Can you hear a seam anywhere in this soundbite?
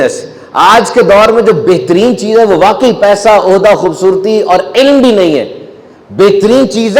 no; 0 cuts

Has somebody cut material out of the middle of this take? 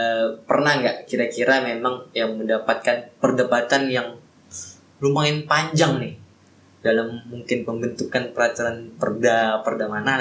no; 0 cuts

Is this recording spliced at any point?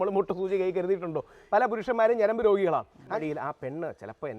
yes; 2 cuts; at 1.6 s, 3.1 s

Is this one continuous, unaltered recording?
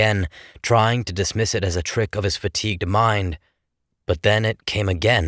yes; 0 cuts

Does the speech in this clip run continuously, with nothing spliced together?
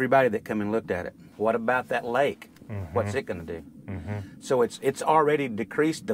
no; 1 cut; at 1.2 s

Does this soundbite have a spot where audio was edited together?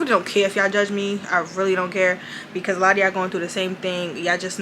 no; 0 cuts

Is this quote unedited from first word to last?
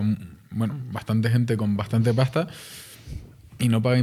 yes; 0 cuts

